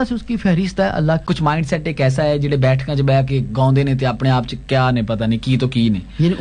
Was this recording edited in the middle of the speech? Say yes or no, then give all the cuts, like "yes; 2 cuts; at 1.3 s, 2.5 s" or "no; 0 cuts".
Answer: yes; 1 cut; at 1.2 s